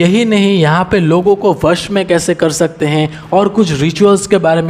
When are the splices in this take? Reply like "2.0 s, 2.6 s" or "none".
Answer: none

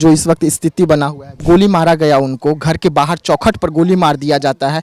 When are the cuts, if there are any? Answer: 1.4 s

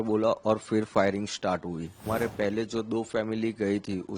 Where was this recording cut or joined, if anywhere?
2.0 s

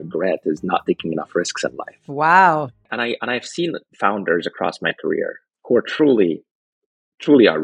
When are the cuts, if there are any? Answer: 2.8 s, 5.5 s

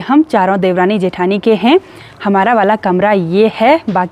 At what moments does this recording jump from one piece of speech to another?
none

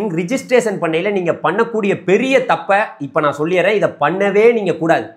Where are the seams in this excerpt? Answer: none

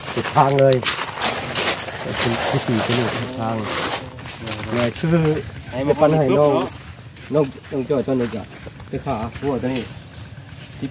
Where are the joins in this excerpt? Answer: none

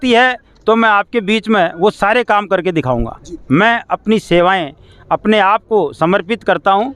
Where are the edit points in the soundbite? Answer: 3.5 s

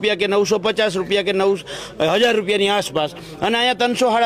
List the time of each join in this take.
none

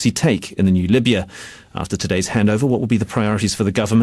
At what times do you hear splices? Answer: 3.1 s

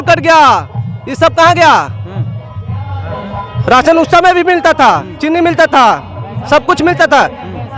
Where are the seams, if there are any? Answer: none

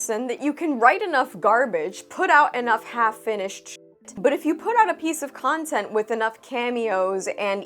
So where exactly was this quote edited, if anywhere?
4.1 s

